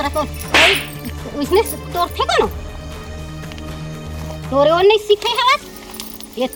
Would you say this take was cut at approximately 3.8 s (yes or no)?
no